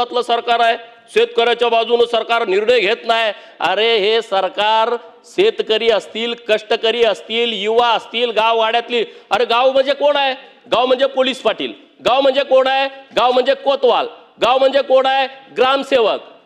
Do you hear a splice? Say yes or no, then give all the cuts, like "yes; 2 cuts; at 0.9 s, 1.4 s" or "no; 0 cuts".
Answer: no; 0 cuts